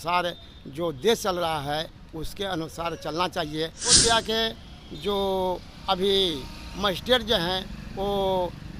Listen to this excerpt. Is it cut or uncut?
cut